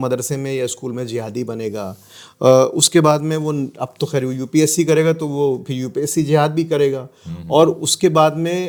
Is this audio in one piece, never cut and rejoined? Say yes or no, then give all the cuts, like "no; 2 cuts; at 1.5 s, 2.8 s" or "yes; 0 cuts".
yes; 0 cuts